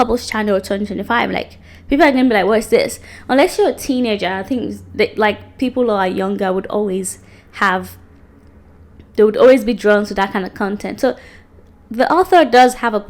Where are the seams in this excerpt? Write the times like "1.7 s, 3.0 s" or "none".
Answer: none